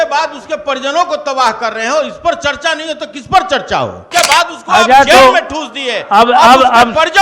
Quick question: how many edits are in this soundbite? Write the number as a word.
one